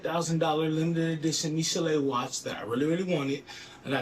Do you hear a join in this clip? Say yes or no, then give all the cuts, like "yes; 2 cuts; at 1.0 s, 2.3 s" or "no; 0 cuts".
no; 0 cuts